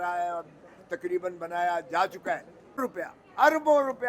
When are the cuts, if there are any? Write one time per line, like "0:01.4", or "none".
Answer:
0:02.9